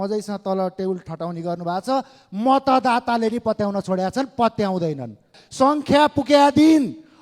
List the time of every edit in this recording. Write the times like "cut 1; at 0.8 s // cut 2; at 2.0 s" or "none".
cut 1; at 5.4 s